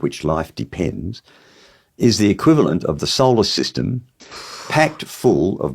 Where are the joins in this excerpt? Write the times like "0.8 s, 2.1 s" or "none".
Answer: 4.2 s